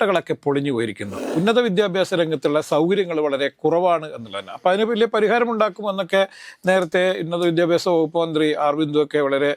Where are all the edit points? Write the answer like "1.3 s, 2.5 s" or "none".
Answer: 1.3 s